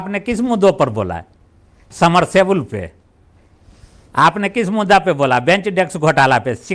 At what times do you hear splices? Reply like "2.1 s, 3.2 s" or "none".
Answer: none